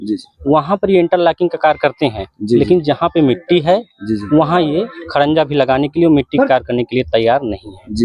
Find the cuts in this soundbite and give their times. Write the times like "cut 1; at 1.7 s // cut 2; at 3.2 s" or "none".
none